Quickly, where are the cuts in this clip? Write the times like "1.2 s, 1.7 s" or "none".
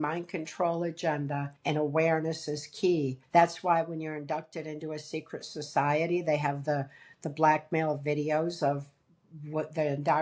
1.5 s, 3.2 s